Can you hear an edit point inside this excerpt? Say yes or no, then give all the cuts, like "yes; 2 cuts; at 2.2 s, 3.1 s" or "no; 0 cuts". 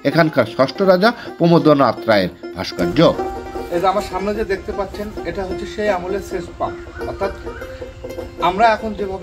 yes; 1 cut; at 3.2 s